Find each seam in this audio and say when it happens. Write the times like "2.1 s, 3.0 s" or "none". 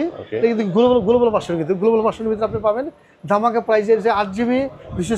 none

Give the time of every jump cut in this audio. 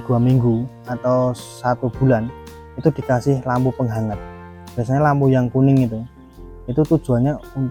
none

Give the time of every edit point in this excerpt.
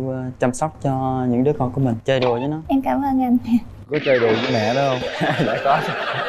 none

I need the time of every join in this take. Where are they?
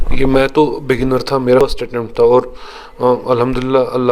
1.6 s

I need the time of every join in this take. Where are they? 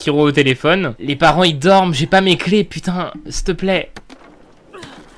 1.0 s

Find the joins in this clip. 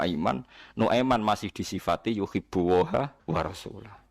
3.2 s

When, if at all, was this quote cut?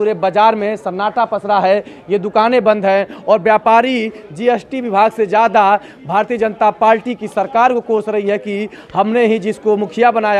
none

